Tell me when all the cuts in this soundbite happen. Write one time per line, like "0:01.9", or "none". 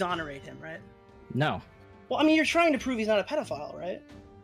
0:01.8